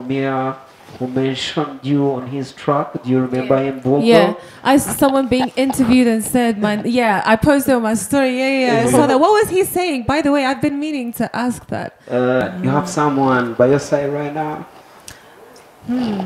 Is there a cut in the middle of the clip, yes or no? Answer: yes